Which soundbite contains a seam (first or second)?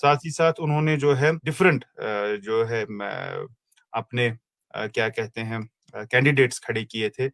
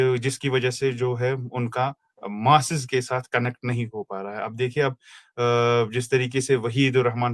first